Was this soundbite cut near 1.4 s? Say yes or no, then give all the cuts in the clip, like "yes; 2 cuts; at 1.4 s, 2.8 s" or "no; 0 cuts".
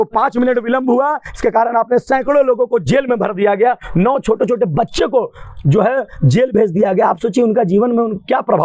no; 0 cuts